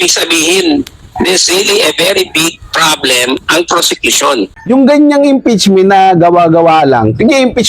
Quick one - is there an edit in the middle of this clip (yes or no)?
yes